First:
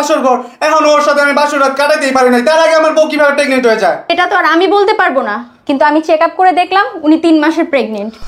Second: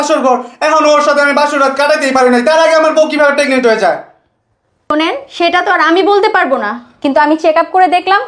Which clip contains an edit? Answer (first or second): first